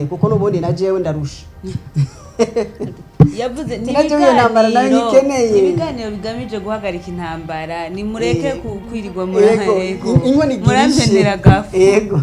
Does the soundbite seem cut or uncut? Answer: uncut